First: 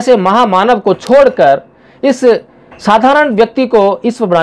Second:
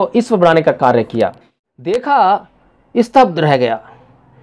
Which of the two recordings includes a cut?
second; 1 cut; at 1.7 s

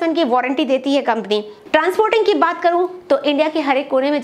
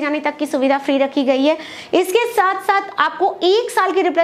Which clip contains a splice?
first; 1 cut; at 1.6 s

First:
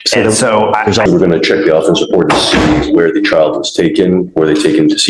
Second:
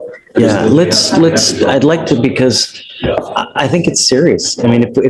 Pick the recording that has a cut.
first; 1 cut; at 1.0 s

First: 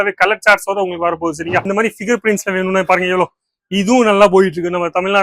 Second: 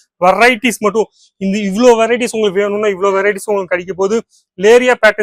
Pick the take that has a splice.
first; 1 cut; at 1.7 s

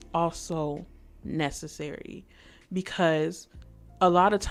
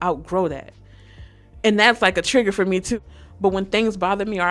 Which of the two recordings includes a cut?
second; 1 cut; at 2.9 s

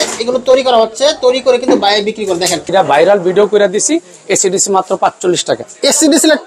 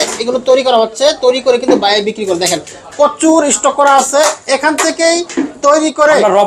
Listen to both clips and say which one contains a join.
first; 1 cut; at 2.7 s

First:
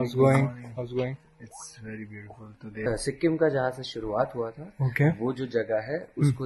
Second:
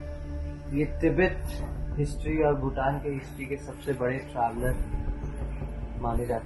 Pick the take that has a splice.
first; 1 cut; at 2.9 s

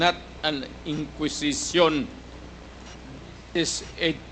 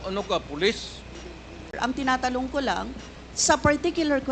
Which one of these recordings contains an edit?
second; 1 cut; at 1.7 s

